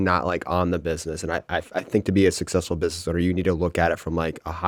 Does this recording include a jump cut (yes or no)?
no